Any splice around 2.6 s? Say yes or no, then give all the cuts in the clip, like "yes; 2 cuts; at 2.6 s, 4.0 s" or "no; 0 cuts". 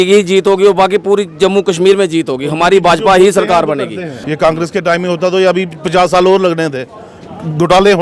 no; 1 cut; at 4.1 s